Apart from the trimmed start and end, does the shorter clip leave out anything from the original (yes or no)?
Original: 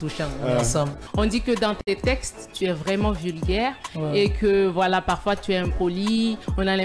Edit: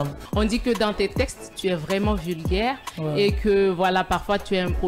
yes